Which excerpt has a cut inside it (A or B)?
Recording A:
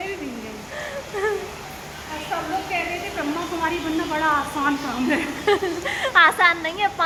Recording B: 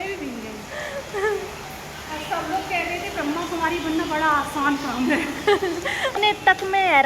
B